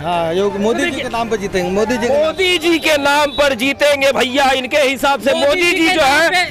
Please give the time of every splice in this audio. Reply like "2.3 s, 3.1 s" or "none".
none